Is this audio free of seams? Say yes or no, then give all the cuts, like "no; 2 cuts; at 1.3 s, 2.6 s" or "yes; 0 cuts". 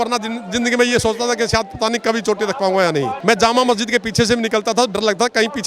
no; 1 cut; at 3.1 s